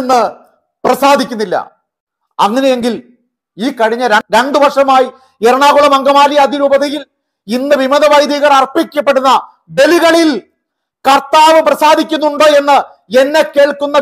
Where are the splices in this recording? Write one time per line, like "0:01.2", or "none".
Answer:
0:04.3